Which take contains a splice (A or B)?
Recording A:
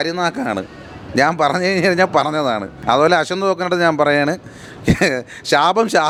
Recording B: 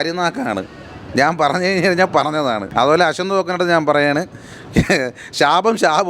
B